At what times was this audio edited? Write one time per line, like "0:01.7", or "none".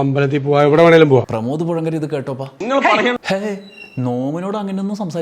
0:02.5
0:03.2